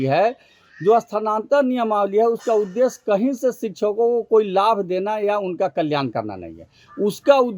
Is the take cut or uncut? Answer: uncut